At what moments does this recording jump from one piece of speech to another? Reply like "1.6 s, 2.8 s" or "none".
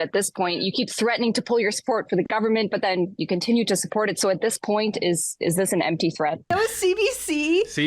6.5 s

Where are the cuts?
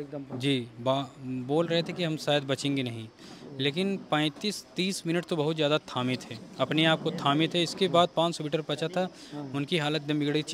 none

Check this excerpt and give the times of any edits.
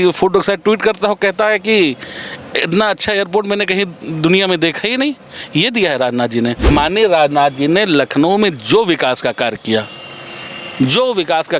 6.7 s

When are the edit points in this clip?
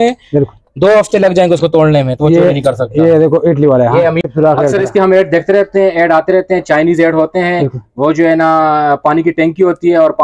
4.3 s

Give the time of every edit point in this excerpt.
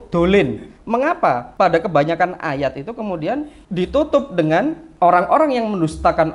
1.1 s, 3.6 s, 4.8 s

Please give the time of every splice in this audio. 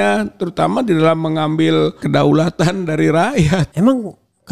2.0 s, 3.7 s

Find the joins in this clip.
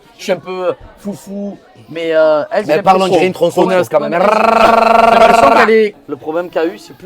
6.0 s

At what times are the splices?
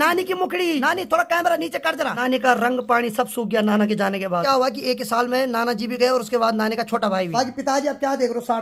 0.8 s, 2.2 s, 4.4 s, 7.3 s

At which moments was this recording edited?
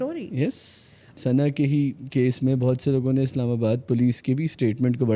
1.2 s

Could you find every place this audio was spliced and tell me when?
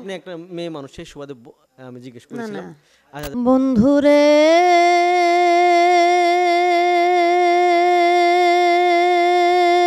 3.3 s

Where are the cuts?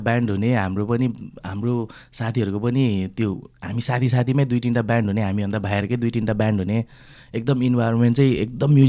none

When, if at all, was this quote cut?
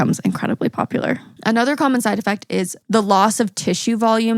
1.3 s, 2.8 s

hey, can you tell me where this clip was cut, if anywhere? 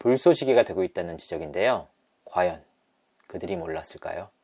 2.0 s

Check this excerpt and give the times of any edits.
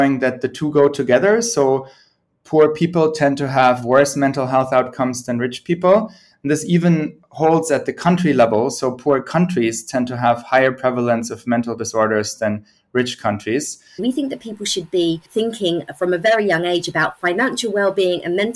14.0 s, 15.3 s

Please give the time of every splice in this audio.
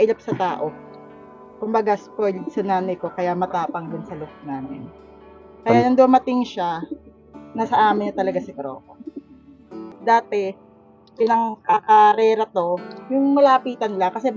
9.8 s

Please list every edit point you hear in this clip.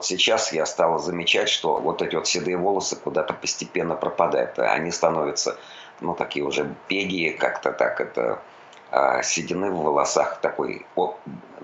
1.8 s

